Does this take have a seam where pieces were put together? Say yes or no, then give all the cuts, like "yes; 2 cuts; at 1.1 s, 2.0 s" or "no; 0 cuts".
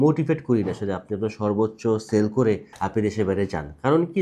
no; 0 cuts